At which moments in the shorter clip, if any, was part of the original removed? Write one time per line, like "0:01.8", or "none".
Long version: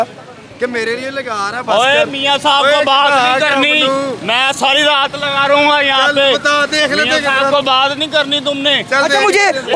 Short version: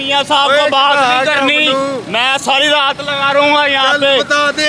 none